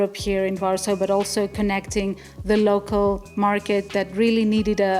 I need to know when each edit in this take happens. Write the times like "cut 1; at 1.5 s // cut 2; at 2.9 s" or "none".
none

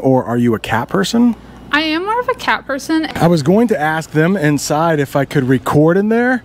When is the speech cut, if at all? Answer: cut 1; at 3.1 s

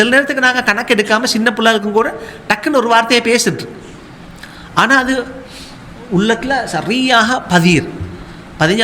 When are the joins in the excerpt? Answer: none

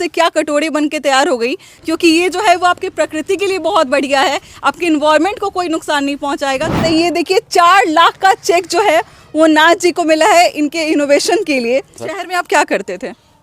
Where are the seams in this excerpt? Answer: cut 1; at 1.7 s // cut 2; at 6.8 s // cut 3; at 12.1 s

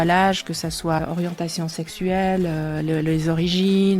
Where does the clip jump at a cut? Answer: cut 1; at 1.0 s

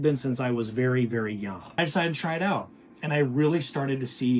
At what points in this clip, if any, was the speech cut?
cut 1; at 1.8 s

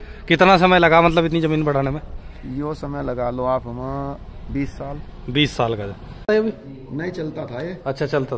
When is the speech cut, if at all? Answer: cut 1; at 6.3 s

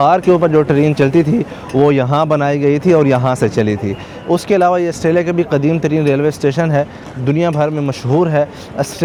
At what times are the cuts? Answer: none

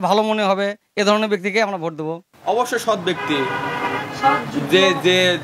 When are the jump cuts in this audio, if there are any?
cut 1; at 2.3 s

